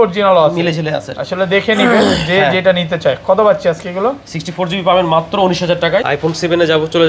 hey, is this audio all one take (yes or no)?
no